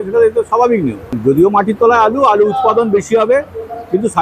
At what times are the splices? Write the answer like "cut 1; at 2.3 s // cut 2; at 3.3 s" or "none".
cut 1; at 1.1 s